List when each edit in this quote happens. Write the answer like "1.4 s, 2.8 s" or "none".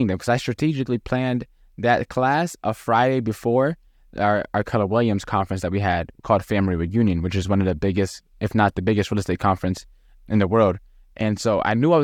none